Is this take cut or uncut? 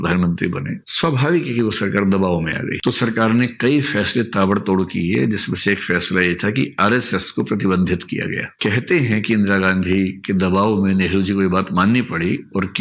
cut